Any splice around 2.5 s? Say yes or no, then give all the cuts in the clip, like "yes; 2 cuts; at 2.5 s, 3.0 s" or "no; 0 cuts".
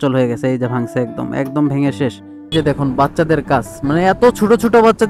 yes; 1 cut; at 2.5 s